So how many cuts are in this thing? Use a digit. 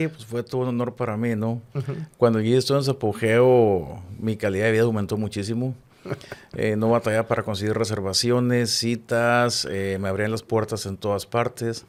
0